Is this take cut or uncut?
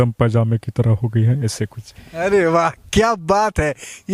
uncut